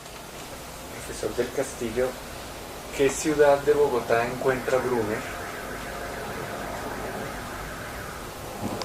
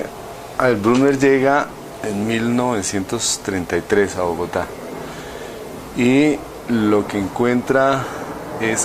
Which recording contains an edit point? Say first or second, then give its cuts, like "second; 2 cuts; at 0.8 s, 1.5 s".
second; 1 cut; at 2.7 s